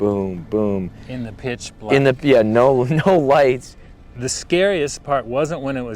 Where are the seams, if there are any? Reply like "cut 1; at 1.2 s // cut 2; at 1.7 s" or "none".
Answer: cut 1; at 4.1 s